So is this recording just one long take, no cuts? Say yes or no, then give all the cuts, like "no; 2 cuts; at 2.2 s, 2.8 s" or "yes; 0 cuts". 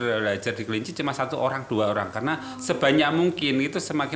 yes; 0 cuts